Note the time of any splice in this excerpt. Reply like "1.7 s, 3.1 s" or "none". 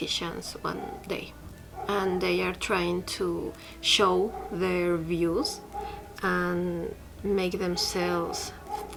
none